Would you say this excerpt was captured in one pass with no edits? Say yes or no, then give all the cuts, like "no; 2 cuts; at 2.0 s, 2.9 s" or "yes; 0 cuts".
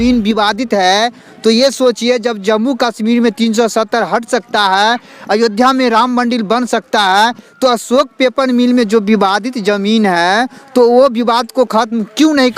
yes; 0 cuts